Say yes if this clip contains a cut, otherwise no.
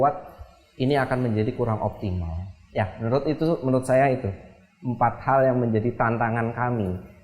no